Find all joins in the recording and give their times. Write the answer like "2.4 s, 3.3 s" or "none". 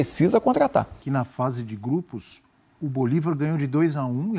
1.0 s